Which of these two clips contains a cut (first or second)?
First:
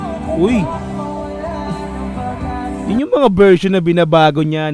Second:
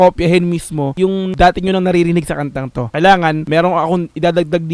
second